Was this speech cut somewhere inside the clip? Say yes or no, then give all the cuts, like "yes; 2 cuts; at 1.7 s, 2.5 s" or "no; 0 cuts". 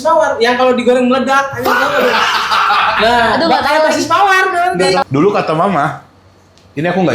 yes; 1 cut; at 5.0 s